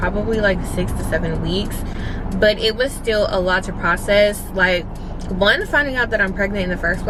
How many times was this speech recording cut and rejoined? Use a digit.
0